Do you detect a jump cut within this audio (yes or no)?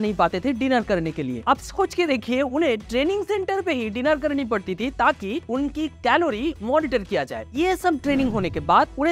no